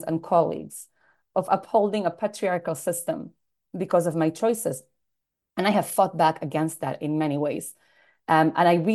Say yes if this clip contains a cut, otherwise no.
yes